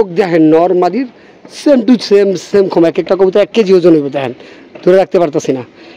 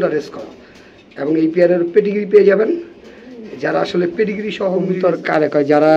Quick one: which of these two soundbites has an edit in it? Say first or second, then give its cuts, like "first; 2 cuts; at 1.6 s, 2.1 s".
second; 1 cut; at 4.8 s